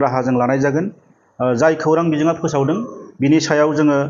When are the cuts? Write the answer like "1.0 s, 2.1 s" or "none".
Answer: none